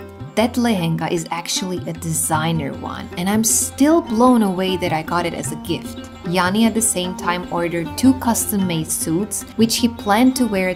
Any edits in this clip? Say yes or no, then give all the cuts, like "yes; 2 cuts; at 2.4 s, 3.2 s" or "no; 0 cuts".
no; 0 cuts